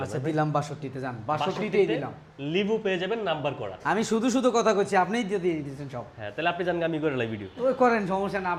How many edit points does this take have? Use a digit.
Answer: 0